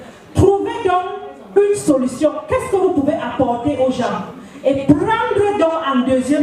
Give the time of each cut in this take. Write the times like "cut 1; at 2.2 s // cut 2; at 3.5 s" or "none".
none